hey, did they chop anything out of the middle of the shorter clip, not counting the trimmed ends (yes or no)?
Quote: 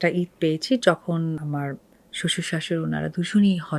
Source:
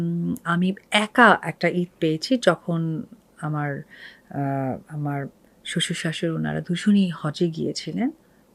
yes